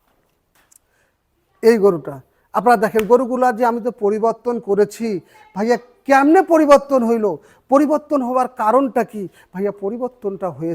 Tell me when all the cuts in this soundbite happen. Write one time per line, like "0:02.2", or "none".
none